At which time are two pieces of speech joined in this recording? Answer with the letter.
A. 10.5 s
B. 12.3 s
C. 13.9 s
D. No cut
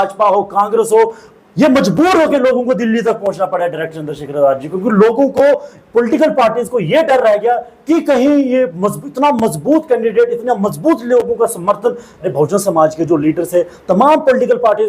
B